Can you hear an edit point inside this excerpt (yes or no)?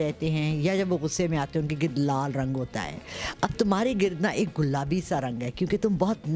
no